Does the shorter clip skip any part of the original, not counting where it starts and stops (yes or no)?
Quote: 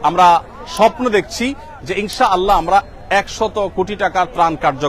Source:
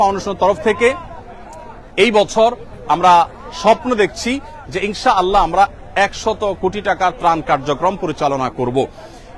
no